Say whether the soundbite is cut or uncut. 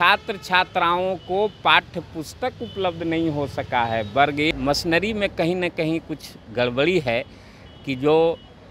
cut